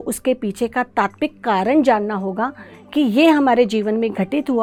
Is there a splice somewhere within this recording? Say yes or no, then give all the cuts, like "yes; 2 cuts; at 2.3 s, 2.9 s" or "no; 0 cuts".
no; 0 cuts